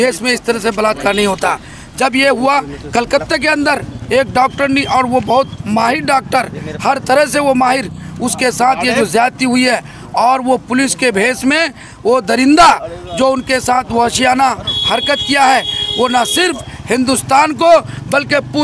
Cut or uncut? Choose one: uncut